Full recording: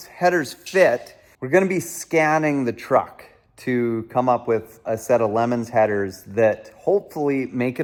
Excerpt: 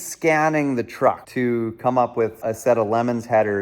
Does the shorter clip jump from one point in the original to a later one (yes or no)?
yes